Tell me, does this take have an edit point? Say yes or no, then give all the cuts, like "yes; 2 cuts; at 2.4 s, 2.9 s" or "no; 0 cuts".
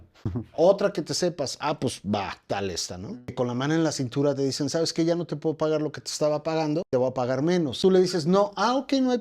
yes; 3 cuts; at 3.2 s, 6.9 s, 7.8 s